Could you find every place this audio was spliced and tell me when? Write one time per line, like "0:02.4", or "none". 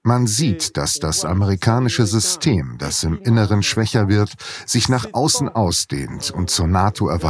none